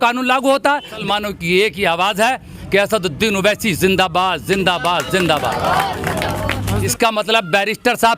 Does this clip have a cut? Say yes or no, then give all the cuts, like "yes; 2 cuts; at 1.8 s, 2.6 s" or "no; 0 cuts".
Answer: yes; 2 cuts; at 1.0 s, 6.9 s